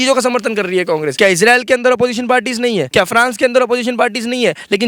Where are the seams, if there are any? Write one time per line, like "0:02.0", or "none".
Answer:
0:01.1
0:02.9